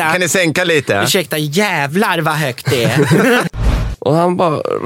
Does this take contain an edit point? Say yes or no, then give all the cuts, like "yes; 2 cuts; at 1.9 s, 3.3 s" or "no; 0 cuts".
yes; 1 cut; at 3.5 s